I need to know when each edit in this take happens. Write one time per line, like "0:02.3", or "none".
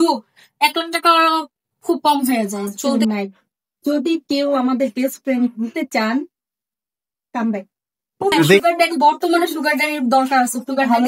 0:02.8
0:08.6